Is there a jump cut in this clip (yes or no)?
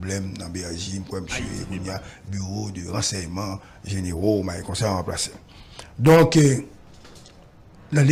no